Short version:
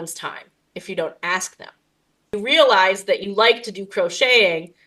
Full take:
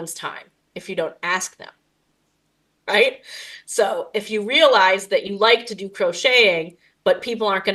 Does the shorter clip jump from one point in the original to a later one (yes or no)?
yes